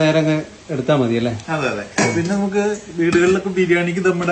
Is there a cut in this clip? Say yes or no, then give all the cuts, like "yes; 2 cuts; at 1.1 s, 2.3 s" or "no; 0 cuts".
no; 0 cuts